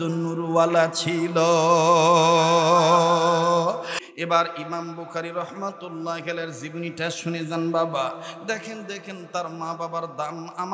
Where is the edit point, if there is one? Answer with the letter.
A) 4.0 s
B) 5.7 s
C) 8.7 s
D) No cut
A